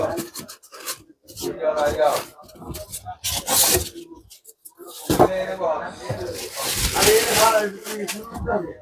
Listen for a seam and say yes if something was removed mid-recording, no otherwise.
no